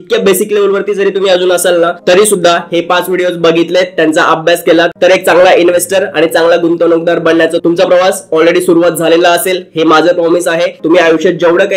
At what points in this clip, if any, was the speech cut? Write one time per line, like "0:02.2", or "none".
0:04.9
0:10.8